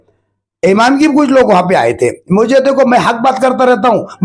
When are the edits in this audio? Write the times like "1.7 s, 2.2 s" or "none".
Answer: none